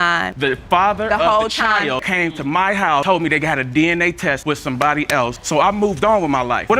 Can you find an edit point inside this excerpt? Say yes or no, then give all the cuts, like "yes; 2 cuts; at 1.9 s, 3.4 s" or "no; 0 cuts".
no; 0 cuts